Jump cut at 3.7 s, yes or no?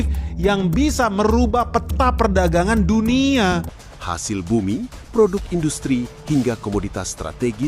yes